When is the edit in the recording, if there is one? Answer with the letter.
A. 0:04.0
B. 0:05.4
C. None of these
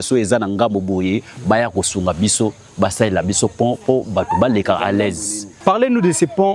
B